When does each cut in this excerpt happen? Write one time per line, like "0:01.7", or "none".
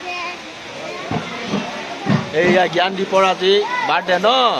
none